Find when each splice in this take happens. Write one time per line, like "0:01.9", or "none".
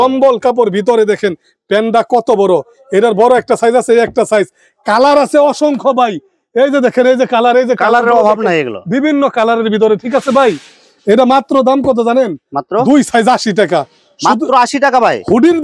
none